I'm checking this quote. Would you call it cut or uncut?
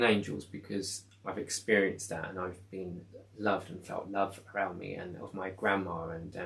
uncut